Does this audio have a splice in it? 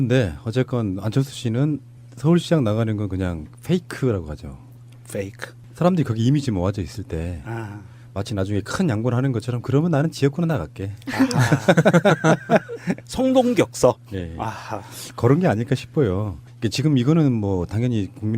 yes; 1 cut; at 2.2 s

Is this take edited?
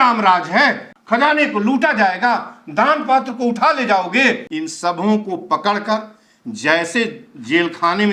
yes; 2 cuts; at 0.9 s, 4.5 s

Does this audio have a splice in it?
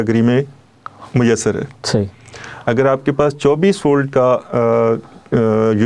no; 0 cuts

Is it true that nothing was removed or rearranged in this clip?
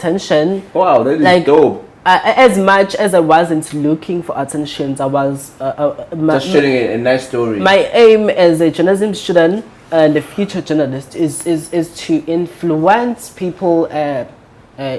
yes; 0 cuts

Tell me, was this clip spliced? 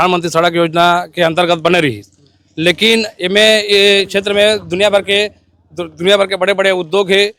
no; 0 cuts

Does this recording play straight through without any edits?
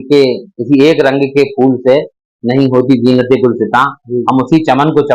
yes; 0 cuts

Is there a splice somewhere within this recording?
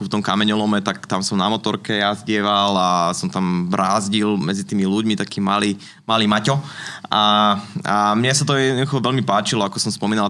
no; 0 cuts

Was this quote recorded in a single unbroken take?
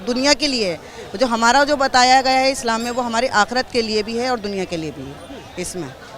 yes; 0 cuts

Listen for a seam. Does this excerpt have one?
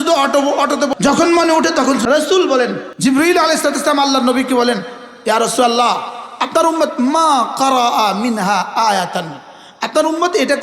yes; 3 cuts; at 0.9 s, 2.0 s, 2.8 s

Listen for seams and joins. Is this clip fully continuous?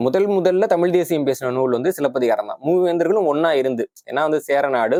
yes; 0 cuts

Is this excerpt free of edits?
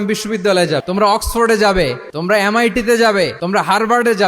no; 3 cuts; at 0.8 s, 2.1 s, 3.4 s

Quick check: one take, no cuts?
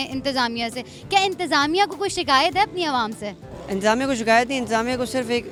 yes; 0 cuts

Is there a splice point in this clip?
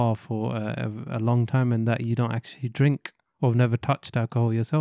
no; 0 cuts

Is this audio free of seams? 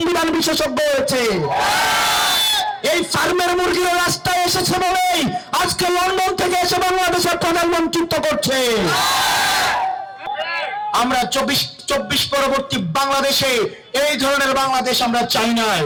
yes; 0 cuts

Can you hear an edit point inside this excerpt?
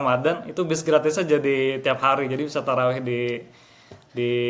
no; 0 cuts

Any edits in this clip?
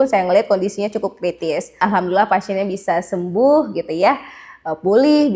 yes; 1 cut; at 1.8 s

